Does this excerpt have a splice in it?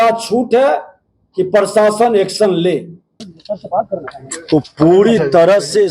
yes; 1 cut; at 3.3 s

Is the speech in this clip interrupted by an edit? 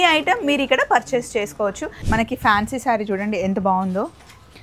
yes; 1 cut; at 1.9 s

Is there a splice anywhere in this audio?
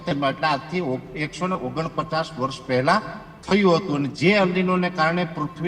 yes; 1 cut; at 4.1 s

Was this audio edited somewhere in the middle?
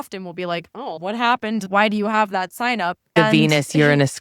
yes; 1 cut; at 1.7 s

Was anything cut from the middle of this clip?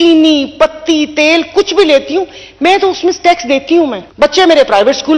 yes; 1 cut; at 4.0 s

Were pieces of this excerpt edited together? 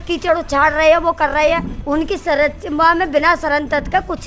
yes; 1 cut; at 1.7 s

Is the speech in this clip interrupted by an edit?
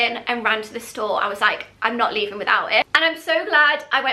yes; 1 cut; at 2.9 s

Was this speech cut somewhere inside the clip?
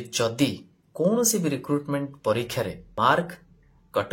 yes; 1 cut; at 2.9 s

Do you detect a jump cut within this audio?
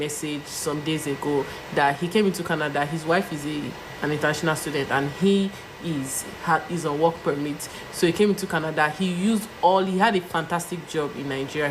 no; 0 cuts

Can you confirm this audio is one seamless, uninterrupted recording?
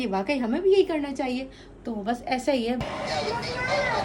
no; 1 cut; at 2.8 s

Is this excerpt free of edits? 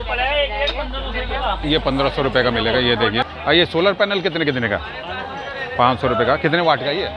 no; 1 cut; at 3.3 s

